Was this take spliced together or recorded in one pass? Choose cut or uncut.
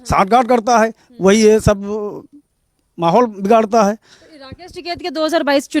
uncut